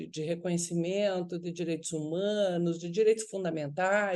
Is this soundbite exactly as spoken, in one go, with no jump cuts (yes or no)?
yes